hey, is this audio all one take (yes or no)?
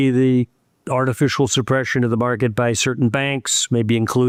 yes